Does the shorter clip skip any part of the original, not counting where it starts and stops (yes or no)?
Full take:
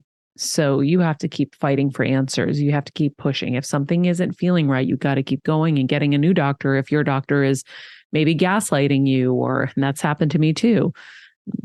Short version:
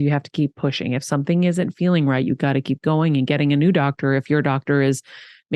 no